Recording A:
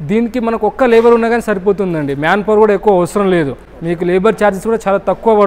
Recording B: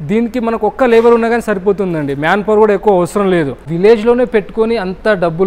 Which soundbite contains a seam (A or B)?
B